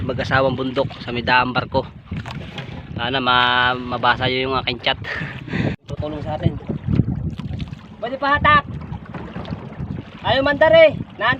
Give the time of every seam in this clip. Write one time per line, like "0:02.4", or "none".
0:05.7